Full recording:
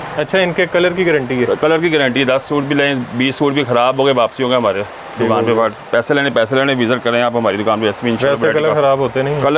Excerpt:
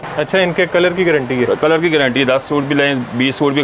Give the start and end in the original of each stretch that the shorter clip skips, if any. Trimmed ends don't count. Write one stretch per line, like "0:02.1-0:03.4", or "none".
none